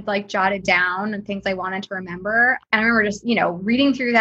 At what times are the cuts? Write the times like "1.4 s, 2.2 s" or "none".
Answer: none